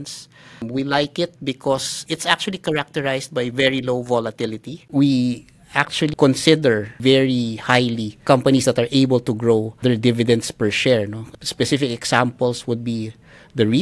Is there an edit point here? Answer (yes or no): yes